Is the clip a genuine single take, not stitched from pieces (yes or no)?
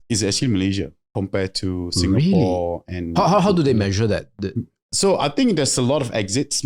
no